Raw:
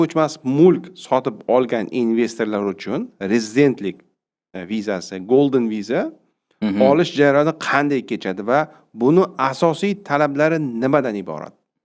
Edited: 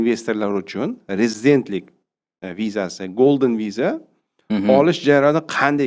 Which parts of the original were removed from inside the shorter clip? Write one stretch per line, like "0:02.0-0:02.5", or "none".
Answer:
none